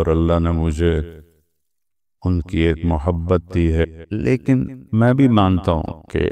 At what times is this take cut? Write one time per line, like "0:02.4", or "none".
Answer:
0:03.8